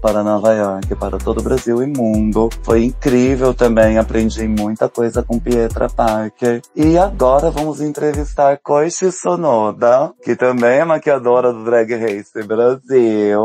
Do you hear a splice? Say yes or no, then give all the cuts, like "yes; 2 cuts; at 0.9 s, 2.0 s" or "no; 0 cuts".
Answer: no; 0 cuts